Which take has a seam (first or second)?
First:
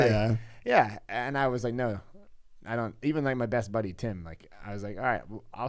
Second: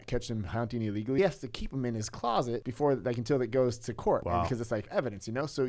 second